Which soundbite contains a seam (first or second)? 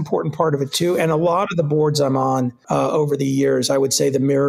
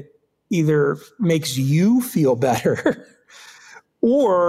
first